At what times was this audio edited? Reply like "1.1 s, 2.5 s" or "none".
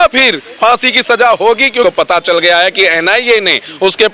1.8 s